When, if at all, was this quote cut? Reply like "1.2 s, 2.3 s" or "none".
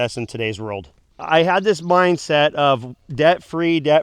1.2 s